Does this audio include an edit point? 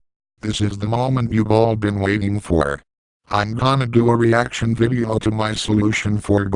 no; 0 cuts

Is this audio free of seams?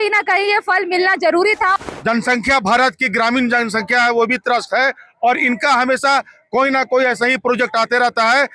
no; 1 cut; at 1.7 s

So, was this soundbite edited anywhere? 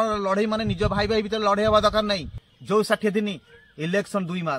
yes; 1 cut; at 2.5 s

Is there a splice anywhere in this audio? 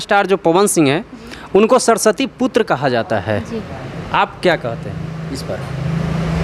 no; 0 cuts

